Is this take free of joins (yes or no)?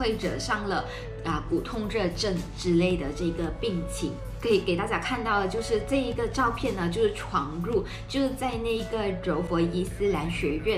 yes